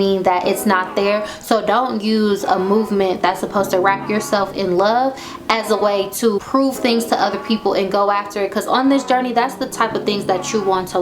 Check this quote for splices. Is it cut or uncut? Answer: uncut